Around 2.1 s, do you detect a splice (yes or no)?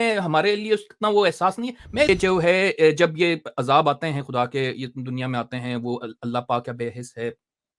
yes